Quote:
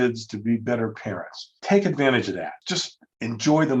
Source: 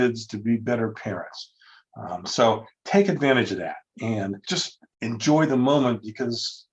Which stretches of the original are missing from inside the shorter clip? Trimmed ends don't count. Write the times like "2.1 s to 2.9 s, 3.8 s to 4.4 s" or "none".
1.5 s to 2.7 s, 3.9 s to 4.4 s